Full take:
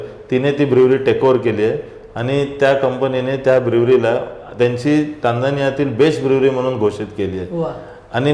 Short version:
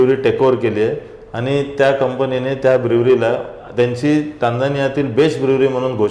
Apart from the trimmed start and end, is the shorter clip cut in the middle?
no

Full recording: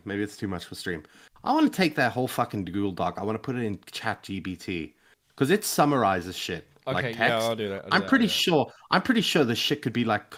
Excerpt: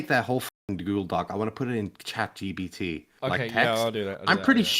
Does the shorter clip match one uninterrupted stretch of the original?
no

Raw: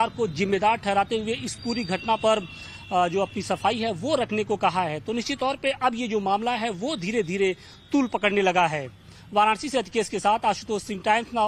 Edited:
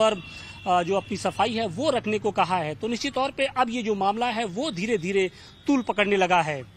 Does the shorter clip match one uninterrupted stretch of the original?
yes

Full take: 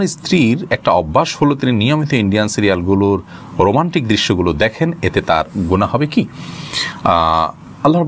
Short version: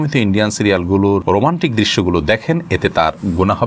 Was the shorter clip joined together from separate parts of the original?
yes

